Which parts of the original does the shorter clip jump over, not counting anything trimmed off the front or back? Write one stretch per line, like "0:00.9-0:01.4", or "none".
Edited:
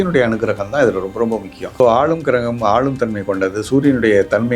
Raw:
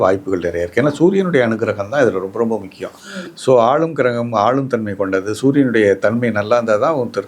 0:03.0-0:03.5